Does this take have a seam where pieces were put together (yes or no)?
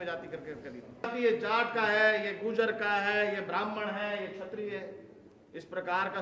yes